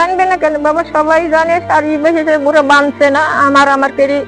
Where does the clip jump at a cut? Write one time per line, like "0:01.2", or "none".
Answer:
none